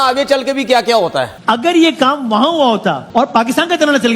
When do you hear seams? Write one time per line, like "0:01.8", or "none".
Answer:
0:01.3